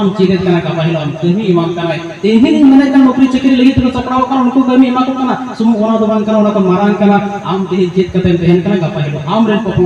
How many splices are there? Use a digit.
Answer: 0